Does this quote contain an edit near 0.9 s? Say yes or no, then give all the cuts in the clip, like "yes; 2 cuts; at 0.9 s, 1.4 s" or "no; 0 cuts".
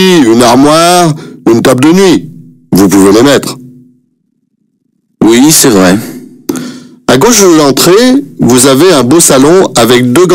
yes; 1 cut; at 0.9 s